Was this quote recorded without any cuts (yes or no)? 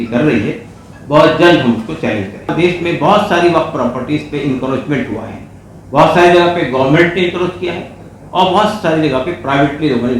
no